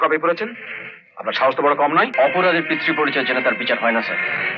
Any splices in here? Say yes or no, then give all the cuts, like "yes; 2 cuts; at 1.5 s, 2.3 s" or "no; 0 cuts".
yes; 1 cut; at 2.1 s